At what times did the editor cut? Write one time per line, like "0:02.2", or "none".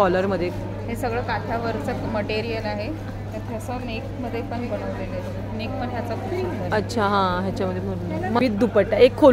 0:08.4